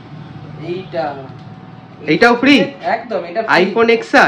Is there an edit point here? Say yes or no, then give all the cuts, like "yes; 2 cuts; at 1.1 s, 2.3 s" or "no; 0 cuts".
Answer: no; 0 cuts